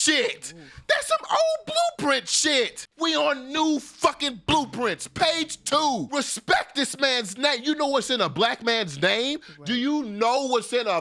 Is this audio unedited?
no; 2 cuts; at 2.8 s, 6.1 s

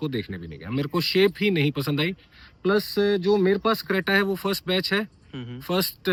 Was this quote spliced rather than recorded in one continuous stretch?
no; 0 cuts

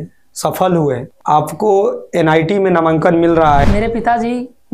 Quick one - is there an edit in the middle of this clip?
yes; 2 cuts; at 1.1 s, 3.6 s

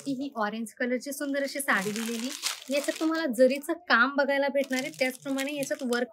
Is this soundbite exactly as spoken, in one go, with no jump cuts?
yes; 0 cuts

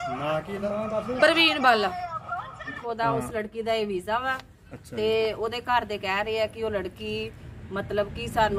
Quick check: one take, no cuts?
no; 1 cut; at 2.8 s

